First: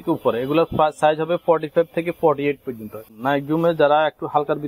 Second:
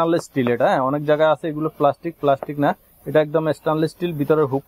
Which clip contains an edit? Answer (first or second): first